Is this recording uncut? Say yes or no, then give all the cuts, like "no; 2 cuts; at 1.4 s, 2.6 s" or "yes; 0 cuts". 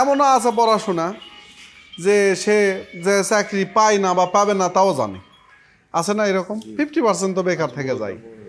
yes; 0 cuts